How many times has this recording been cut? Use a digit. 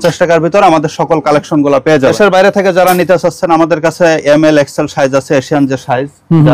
1